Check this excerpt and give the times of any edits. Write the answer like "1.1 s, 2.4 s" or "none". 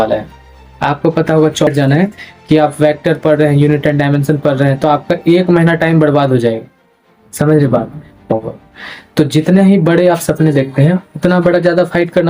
1.7 s, 8.3 s